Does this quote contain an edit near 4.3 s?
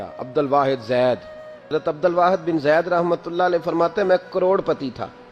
no; 1 cut; at 1.7 s

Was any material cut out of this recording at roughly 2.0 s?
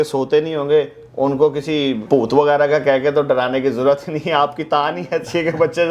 yes; 1 cut; at 2.0 s

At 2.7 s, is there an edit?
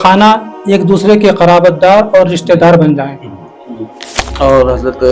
no; 1 cut; at 4.2 s

